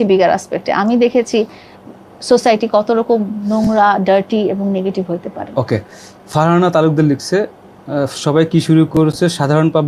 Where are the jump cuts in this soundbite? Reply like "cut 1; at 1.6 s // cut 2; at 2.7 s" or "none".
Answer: none